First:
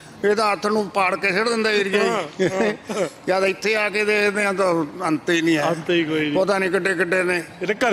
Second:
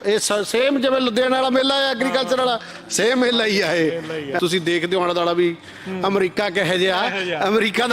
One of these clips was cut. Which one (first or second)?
second